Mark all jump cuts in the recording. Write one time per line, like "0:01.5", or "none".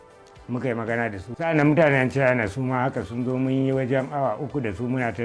0:01.4